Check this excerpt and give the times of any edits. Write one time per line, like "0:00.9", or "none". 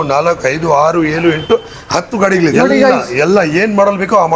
0:02.5